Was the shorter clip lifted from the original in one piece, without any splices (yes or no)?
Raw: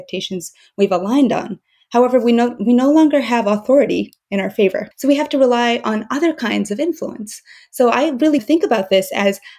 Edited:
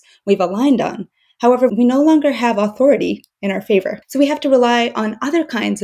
no